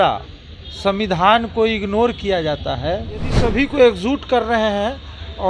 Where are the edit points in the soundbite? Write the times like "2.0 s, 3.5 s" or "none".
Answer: 3.3 s

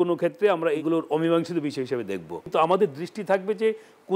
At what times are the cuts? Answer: 0.8 s, 2.5 s

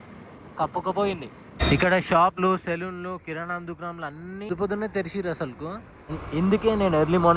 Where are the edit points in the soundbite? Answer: 1.5 s, 6.1 s

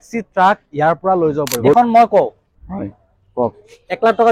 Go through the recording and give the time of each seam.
1.7 s

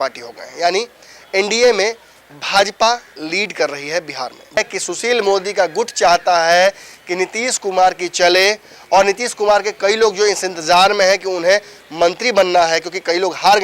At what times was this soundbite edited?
4.6 s

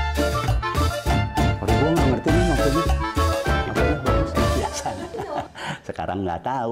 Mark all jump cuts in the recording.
none

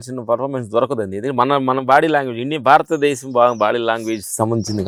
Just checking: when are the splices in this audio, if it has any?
none

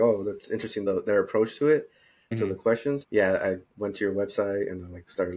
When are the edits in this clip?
0.8 s, 2.5 s

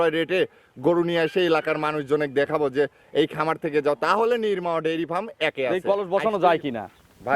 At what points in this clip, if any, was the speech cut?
5.8 s

